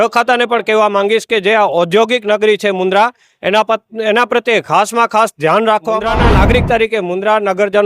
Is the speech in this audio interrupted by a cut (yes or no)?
yes